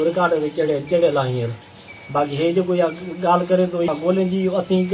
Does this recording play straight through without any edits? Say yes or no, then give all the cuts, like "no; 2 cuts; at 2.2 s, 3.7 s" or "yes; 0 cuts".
no; 1 cut; at 3.9 s